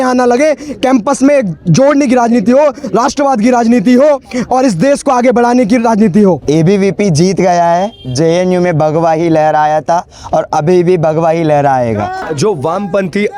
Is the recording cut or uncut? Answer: cut